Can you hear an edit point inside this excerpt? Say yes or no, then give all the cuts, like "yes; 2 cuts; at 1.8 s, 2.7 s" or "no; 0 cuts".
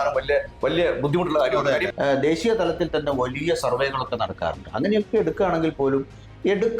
yes; 1 cut; at 1.9 s